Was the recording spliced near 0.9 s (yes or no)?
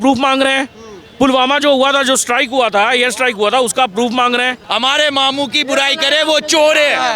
no